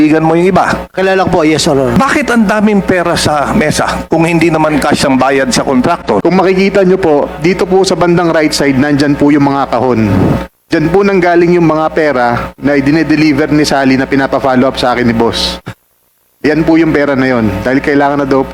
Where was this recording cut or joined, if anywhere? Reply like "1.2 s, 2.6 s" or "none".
1.9 s, 6.2 s